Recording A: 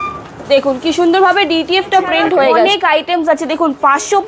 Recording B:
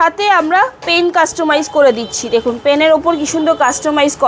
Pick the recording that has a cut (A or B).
A